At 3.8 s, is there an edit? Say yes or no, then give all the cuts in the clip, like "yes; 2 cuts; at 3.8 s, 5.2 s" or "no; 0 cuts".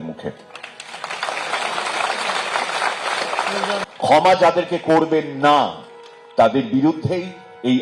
yes; 1 cut; at 3.8 s